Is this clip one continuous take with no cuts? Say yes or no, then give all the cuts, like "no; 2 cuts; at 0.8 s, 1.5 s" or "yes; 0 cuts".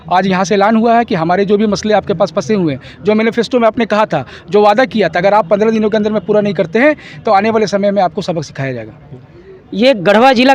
yes; 0 cuts